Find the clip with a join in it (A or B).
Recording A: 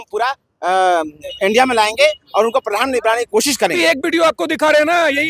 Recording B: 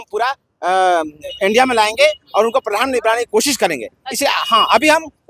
A